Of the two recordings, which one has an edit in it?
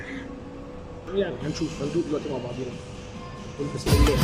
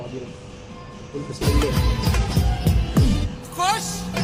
first; 1 cut; at 1.1 s

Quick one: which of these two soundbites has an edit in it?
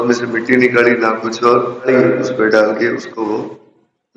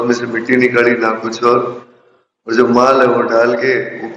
first; 1 cut; at 1.9 s

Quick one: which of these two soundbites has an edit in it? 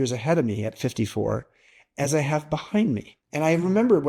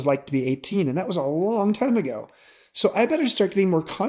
first; 1 cut; at 3.2 s

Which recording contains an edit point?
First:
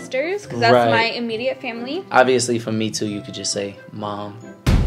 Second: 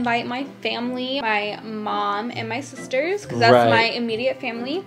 second; 1 cut; at 1.2 s

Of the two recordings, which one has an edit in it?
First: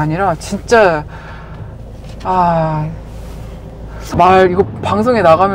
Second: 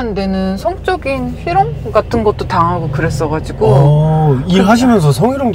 first; 1 cut; at 4.1 s

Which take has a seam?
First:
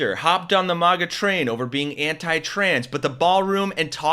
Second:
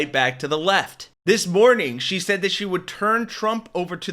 second; 1 cut; at 1.1 s

